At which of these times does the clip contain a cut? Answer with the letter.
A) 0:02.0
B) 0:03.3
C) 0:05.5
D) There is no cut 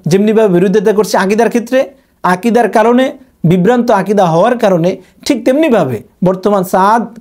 D